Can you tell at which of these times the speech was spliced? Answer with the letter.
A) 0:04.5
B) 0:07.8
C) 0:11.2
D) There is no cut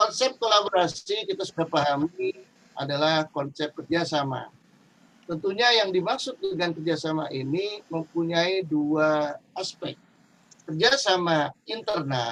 D